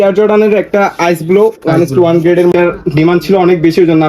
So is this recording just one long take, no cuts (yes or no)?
no